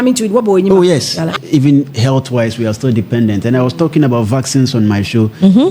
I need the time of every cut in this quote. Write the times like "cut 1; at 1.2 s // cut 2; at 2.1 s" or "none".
cut 1; at 1.3 s